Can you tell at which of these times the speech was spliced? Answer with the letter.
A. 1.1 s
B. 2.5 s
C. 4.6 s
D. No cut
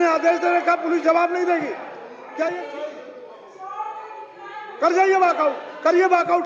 B